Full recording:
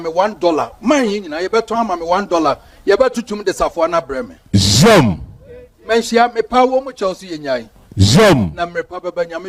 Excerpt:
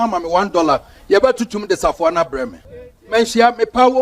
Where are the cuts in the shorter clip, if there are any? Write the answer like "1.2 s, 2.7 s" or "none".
2.6 s

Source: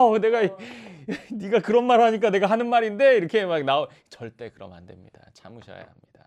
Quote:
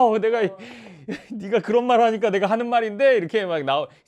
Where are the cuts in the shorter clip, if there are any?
none

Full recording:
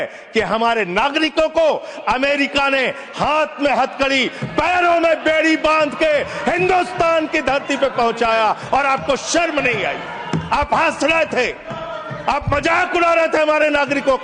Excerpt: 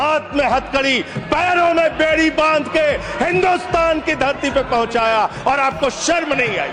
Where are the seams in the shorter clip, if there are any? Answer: none

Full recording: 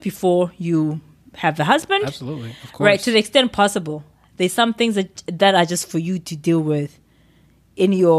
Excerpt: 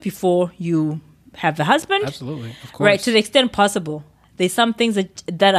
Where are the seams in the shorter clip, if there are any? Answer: none

